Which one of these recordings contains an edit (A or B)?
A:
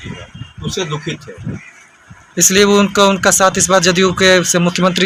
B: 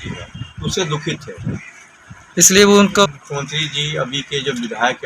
B